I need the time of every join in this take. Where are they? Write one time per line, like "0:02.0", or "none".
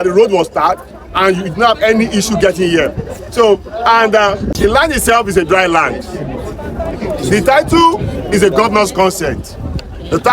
0:04.5